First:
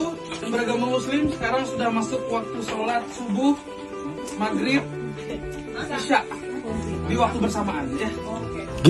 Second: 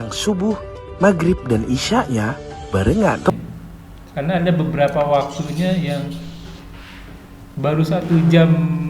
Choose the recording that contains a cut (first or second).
second